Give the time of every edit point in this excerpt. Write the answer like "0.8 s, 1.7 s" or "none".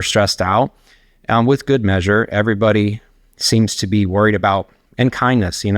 4.9 s